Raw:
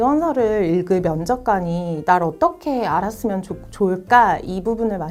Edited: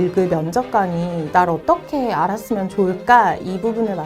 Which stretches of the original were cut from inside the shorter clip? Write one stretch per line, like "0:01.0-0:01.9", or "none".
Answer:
0:03.4-0:03.7